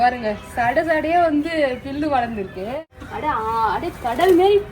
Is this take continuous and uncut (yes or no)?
no